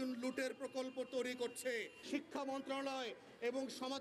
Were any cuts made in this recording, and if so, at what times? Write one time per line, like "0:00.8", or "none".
0:02.0